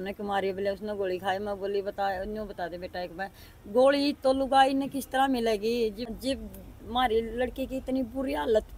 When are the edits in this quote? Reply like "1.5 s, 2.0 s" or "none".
6.1 s